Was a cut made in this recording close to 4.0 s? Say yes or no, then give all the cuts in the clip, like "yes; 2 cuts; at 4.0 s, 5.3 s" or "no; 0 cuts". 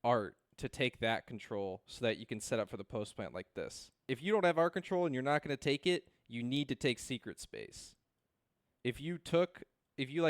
yes; 1 cut; at 4.0 s